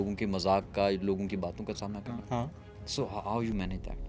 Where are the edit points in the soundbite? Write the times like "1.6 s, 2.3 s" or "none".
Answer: 2.7 s